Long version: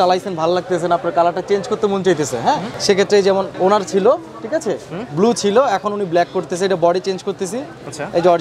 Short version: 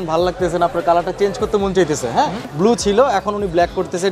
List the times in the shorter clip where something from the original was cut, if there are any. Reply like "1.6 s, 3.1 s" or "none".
2.4 s